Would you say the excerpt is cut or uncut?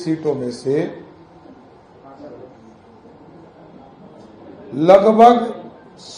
uncut